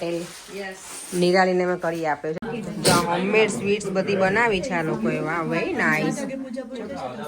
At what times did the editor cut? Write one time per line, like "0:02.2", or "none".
0:02.4

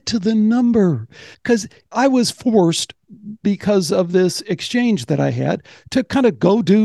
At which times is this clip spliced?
0:01.4

